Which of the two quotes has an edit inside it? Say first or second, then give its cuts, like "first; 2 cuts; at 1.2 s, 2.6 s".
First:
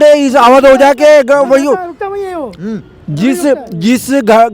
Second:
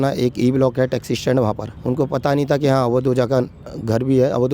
second; 1 cut; at 1.7 s